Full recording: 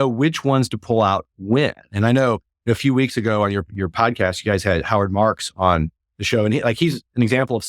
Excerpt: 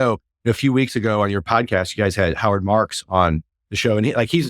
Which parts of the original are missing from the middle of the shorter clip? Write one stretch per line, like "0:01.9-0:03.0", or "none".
0:03.7-0:03.9